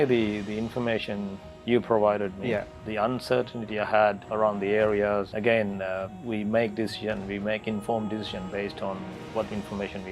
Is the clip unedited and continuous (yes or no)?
no